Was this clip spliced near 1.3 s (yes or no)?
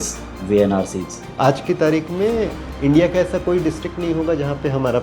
yes